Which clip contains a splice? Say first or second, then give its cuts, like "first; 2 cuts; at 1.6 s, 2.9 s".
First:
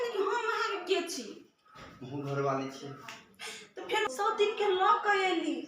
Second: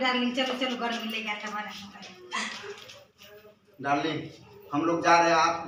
first; 1 cut; at 4.0 s